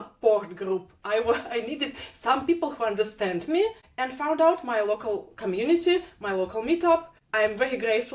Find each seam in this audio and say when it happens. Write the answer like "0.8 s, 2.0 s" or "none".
3.9 s, 7.2 s